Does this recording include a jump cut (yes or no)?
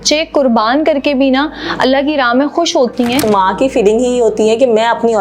yes